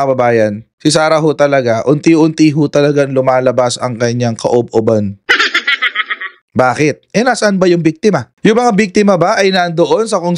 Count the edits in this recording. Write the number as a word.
two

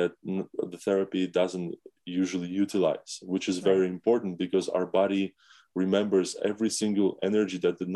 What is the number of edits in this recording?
zero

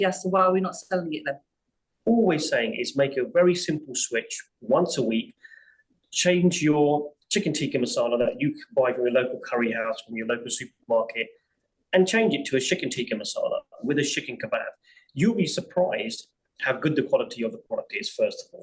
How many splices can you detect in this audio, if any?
one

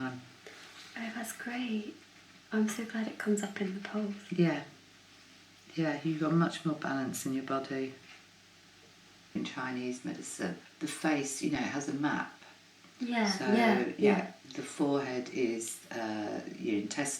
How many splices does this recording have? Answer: two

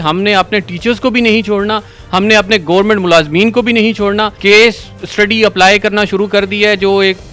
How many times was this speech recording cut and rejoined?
one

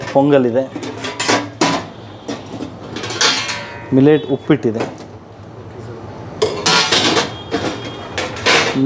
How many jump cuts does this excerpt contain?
zero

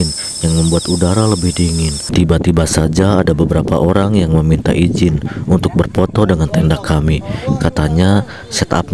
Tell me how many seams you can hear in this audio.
one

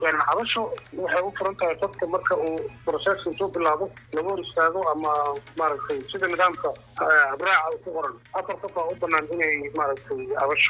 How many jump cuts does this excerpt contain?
one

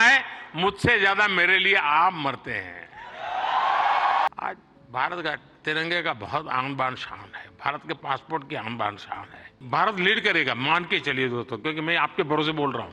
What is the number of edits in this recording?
two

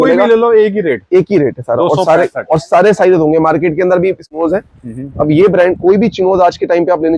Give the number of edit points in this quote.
one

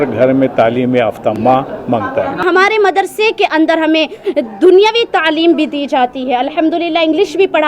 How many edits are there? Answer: two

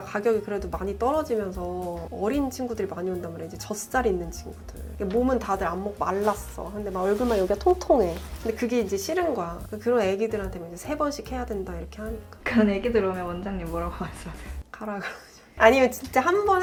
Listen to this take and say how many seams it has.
zero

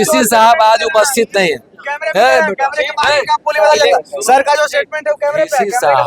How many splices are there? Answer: zero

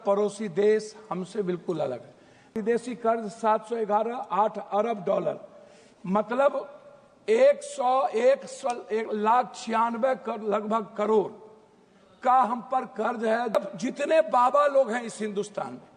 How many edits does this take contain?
two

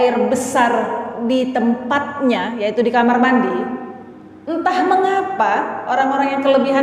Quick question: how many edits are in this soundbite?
zero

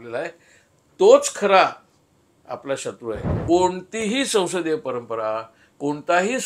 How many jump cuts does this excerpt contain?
one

